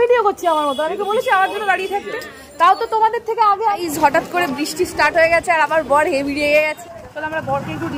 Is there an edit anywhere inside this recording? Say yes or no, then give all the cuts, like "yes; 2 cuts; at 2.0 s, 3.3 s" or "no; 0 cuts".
yes; 2 cuts; at 3.8 s, 6.8 s